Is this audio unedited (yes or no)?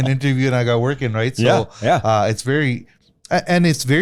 yes